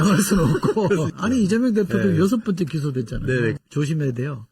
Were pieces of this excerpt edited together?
yes; 2 cuts; at 1.1 s, 3.6 s

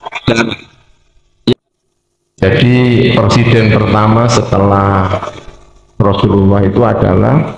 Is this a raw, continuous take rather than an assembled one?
no; 1 cut; at 1.5 s

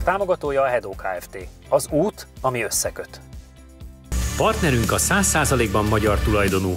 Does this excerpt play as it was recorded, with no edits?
no; 1 cut; at 4.0 s

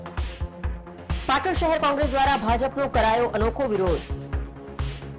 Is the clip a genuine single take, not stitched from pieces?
no; 1 cut; at 1.2 s

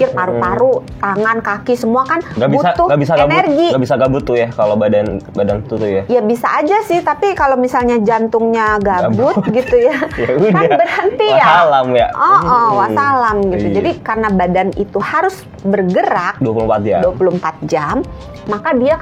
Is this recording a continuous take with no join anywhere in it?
yes; 0 cuts

